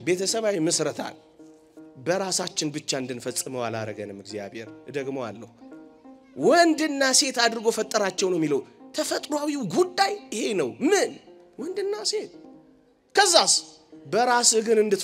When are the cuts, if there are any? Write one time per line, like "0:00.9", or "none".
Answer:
none